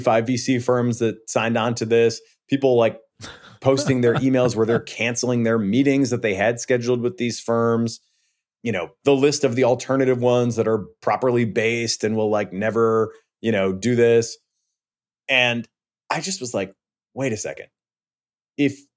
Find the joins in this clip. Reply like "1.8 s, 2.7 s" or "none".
none